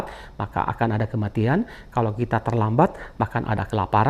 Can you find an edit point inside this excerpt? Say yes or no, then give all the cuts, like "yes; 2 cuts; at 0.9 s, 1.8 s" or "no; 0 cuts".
no; 0 cuts